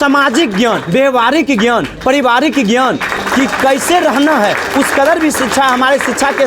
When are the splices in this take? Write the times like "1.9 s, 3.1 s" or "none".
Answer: none